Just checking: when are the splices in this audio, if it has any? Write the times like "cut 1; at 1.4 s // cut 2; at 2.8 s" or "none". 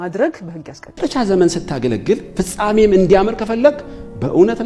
cut 1; at 0.9 s